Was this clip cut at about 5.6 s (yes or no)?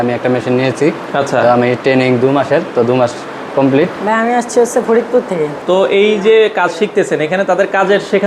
yes